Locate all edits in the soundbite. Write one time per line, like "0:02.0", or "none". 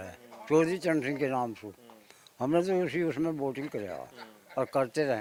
none